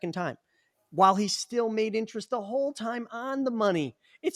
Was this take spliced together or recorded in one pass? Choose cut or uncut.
uncut